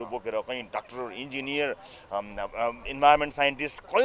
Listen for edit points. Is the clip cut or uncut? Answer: uncut